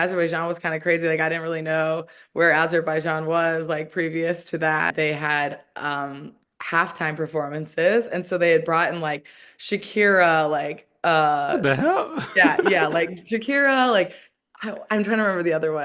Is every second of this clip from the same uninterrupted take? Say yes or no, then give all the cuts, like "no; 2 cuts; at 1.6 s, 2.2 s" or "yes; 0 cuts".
no; 1 cut; at 4.9 s